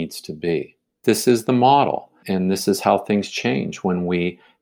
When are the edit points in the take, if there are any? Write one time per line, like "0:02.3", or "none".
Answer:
0:00.9
0:02.2